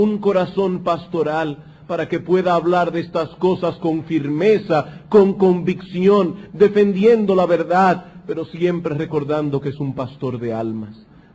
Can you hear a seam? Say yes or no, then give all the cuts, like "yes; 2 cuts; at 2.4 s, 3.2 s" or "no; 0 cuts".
yes; 1 cut; at 7.8 s